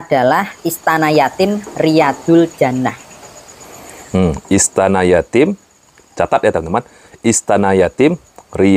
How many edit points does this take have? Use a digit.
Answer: 0